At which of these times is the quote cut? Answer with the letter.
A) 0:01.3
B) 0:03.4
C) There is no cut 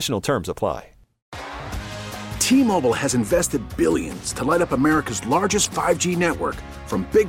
A